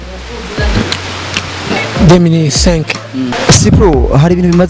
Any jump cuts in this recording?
yes; 1 cut; at 3.3 s

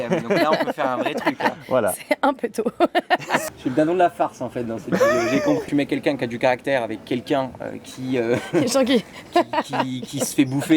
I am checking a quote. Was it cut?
yes; 2 cuts; at 3.4 s, 5.6 s

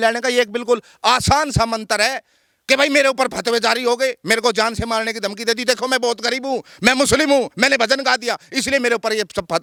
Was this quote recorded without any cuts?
yes; 0 cuts

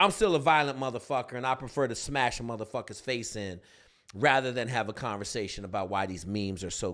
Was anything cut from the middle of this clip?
no; 0 cuts

